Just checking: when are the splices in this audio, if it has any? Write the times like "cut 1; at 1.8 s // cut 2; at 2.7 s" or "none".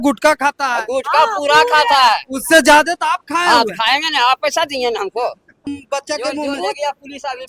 cut 1; at 5.7 s